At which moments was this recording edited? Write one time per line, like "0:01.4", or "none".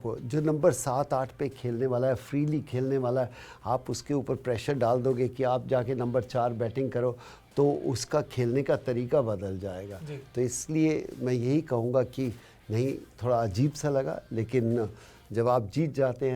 none